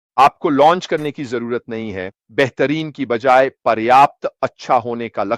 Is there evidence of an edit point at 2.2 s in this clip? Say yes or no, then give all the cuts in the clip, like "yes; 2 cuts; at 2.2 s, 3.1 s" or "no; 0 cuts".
yes; 1 cut; at 2.2 s